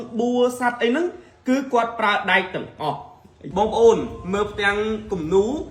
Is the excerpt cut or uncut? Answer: cut